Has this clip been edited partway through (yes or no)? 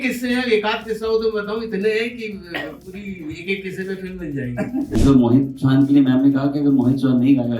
yes